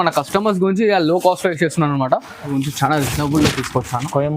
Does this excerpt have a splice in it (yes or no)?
yes